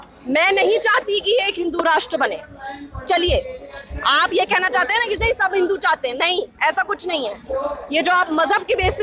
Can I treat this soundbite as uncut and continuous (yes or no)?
yes